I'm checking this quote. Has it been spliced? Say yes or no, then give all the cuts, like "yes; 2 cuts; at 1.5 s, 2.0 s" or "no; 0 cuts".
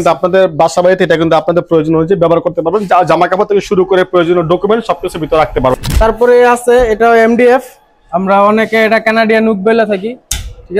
yes; 1 cut; at 5.8 s